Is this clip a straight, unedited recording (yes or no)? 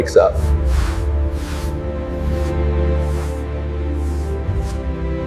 yes